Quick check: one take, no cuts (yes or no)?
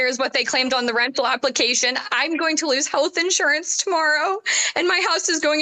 yes